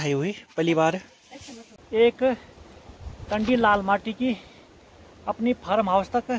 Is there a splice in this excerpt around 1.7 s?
yes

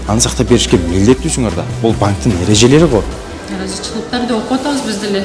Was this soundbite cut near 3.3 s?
yes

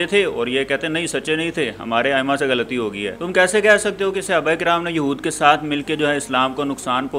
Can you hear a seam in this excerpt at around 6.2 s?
no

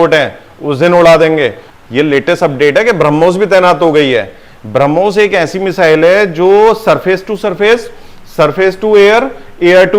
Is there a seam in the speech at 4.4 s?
no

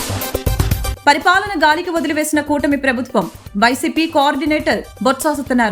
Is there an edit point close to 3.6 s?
no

